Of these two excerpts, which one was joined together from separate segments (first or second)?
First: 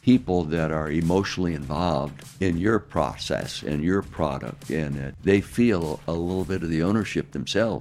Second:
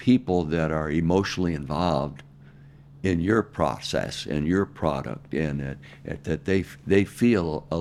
first